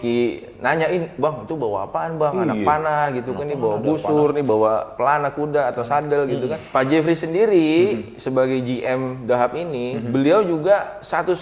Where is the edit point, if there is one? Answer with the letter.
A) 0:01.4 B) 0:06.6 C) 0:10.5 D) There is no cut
B